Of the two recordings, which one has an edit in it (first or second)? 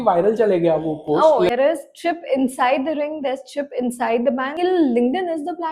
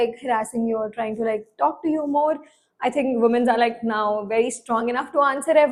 first